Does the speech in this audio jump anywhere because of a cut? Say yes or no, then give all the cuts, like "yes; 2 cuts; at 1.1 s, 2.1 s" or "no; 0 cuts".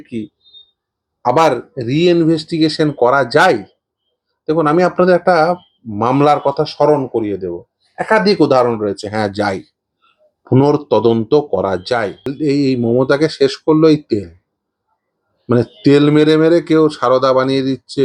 yes; 1 cut; at 12.3 s